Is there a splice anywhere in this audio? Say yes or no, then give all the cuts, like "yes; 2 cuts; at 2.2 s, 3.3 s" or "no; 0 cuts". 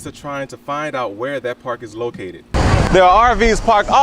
yes; 1 cut; at 2.4 s